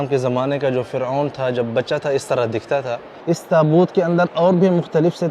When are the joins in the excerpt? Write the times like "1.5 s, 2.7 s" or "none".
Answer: 3.1 s